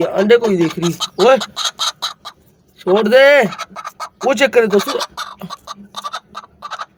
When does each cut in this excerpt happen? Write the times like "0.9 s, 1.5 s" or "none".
none